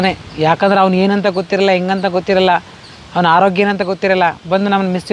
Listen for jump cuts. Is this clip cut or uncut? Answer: uncut